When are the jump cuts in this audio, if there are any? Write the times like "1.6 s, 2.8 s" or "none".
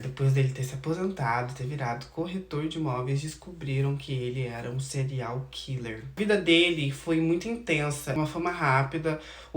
6.2 s, 8.1 s